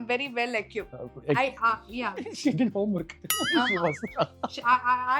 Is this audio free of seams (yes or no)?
yes